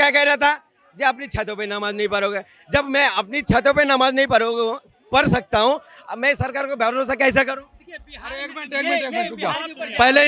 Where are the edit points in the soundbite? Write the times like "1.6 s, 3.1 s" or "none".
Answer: none